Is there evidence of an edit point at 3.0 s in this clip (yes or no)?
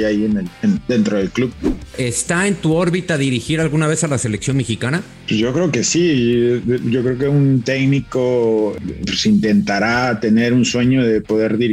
no